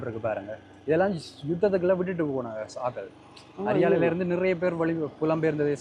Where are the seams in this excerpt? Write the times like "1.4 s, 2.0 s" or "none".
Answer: none